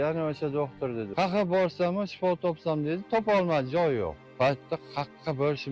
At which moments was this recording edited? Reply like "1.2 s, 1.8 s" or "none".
1.1 s, 4.2 s